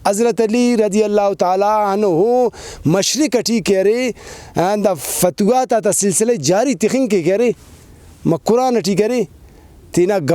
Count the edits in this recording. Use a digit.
0